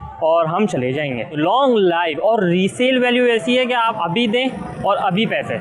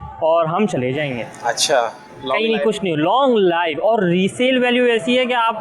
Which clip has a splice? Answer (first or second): first